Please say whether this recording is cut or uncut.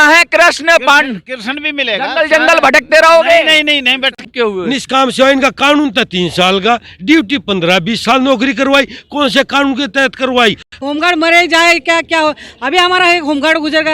cut